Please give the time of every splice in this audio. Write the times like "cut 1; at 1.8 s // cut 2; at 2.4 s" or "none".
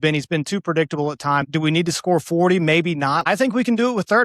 cut 1; at 1.5 s // cut 2; at 3.3 s